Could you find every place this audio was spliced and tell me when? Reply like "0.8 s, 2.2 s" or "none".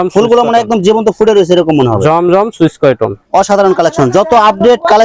3.2 s